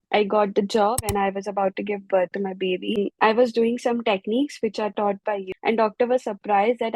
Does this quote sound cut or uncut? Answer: cut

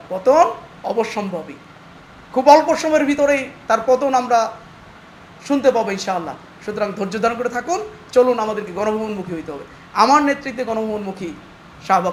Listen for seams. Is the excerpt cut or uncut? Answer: uncut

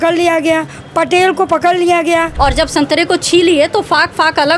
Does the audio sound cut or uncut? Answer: cut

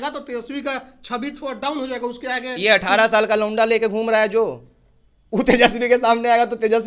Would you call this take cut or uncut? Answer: uncut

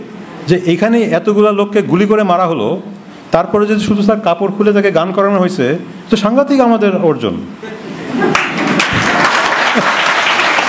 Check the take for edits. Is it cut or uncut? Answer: uncut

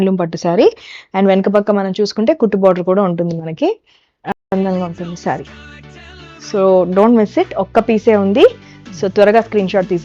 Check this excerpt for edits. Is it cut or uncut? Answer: cut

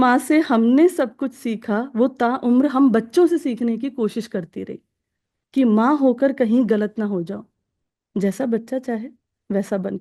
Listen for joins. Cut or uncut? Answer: uncut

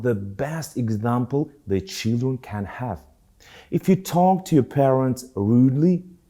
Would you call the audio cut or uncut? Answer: uncut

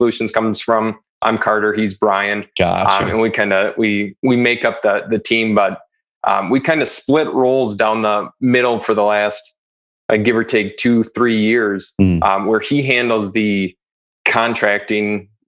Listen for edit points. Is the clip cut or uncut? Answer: uncut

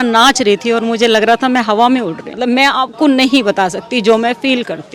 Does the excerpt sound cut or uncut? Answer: cut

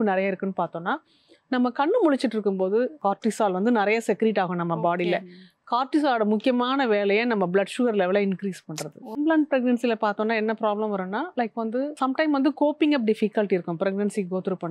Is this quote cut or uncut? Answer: cut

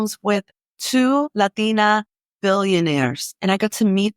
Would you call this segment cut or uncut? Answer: cut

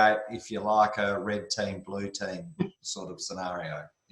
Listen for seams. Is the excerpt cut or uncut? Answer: uncut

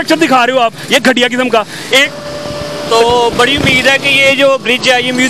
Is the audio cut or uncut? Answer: cut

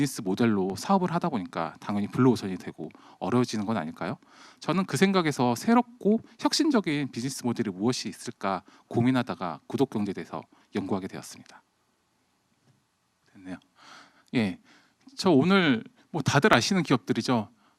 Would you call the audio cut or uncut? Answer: cut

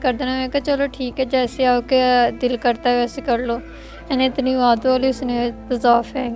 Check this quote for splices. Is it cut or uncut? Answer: uncut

